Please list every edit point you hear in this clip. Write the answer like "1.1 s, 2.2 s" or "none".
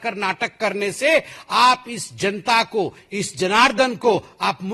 none